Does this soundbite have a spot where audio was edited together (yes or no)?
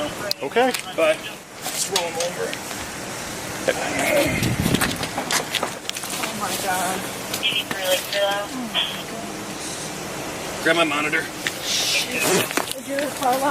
yes